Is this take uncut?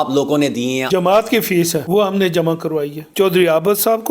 no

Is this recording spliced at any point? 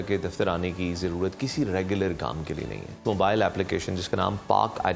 yes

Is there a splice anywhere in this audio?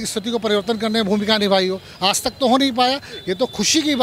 no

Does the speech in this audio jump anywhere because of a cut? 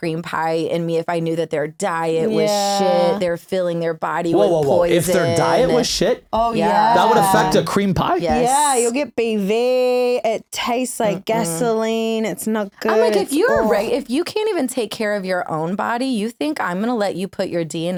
no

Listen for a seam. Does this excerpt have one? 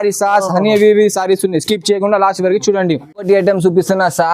no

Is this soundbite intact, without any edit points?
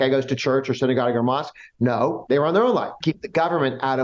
no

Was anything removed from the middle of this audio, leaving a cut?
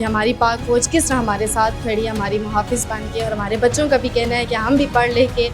no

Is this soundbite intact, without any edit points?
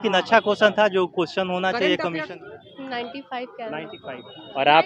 no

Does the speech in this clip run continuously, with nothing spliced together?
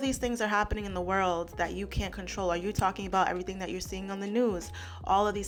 yes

